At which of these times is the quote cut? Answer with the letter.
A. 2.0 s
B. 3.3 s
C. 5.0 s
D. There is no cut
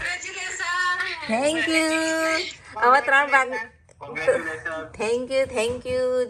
D